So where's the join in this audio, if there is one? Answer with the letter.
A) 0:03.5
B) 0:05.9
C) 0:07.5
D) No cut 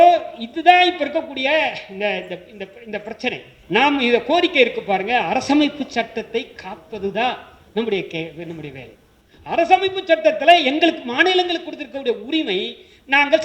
A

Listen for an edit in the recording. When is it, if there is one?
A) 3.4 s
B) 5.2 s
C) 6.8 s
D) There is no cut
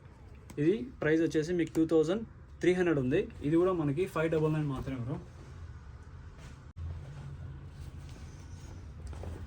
C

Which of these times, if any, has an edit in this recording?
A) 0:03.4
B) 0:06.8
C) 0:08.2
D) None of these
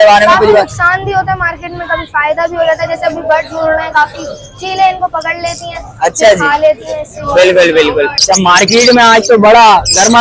C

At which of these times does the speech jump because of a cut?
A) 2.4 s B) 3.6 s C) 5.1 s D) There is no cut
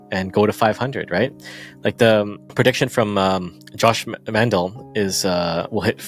A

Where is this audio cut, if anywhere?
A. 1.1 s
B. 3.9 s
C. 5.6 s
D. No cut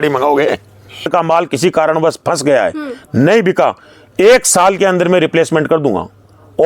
A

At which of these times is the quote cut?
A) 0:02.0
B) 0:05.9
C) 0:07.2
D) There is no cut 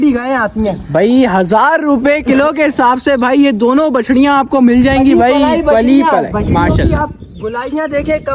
D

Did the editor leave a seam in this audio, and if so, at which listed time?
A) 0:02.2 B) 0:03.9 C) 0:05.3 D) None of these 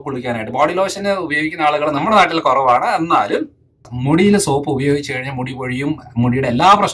B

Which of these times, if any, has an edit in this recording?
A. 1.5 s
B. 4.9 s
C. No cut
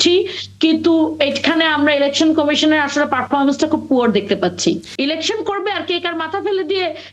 B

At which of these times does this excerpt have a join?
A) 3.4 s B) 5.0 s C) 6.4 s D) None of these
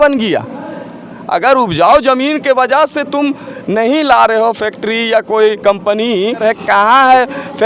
C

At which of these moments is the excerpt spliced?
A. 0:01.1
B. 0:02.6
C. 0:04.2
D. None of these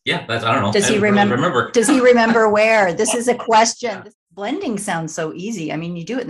C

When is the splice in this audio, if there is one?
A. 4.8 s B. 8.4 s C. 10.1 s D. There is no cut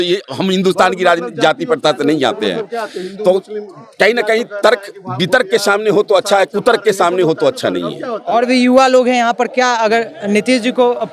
D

